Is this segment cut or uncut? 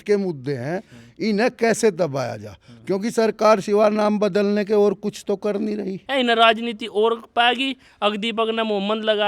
cut